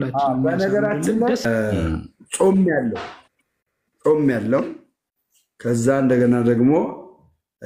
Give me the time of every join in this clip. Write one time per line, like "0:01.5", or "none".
0:01.3